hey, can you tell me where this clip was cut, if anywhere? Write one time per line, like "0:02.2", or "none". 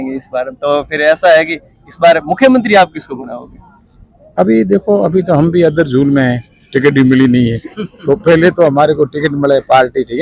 none